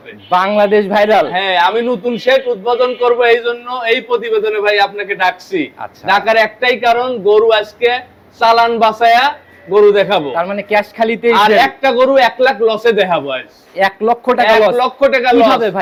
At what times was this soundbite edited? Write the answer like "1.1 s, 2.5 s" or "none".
none

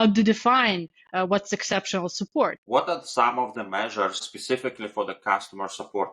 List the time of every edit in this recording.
2.6 s, 4.3 s

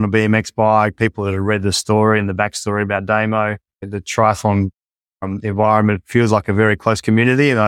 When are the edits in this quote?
3.8 s

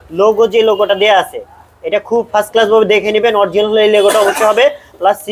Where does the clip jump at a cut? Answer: none

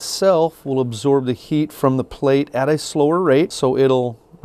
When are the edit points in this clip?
3.5 s

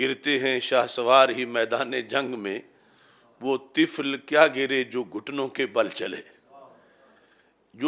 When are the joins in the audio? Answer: none

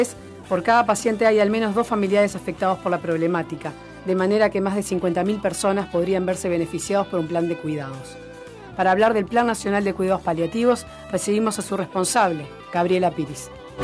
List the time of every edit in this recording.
none

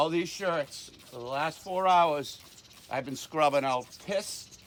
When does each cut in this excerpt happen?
none

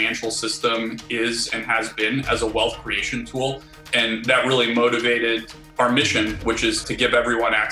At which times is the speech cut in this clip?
5.6 s, 6.8 s

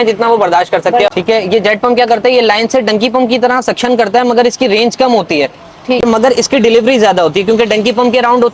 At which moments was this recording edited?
1.1 s, 6.0 s

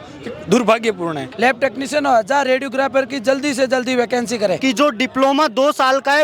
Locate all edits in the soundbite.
1.2 s, 4.6 s

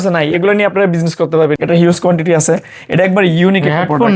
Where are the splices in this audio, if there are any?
1.6 s

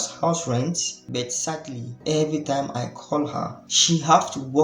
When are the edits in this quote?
0.9 s, 1.9 s, 3.7 s

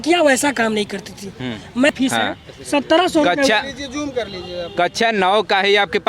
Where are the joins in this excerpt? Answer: 1.9 s

